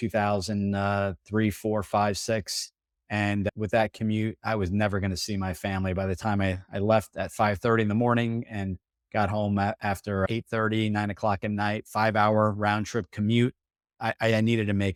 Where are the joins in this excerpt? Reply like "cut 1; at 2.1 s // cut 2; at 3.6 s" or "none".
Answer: none